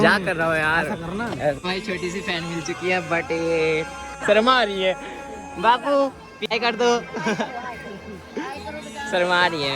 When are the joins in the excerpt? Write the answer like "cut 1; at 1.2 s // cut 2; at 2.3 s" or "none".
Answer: cut 1; at 1.6 s // cut 2; at 4.2 s // cut 3; at 6.6 s